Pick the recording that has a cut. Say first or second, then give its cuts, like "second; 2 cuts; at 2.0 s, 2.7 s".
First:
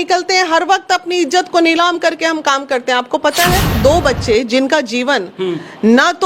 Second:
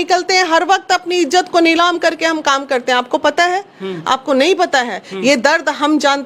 first; 1 cut; at 3.8 s